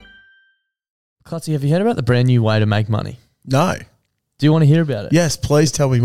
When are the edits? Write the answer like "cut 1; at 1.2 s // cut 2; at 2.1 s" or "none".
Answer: cut 1; at 1.0 s